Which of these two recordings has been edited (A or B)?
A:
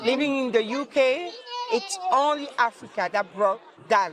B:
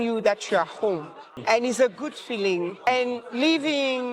B